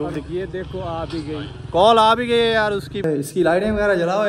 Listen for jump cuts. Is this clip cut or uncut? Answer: cut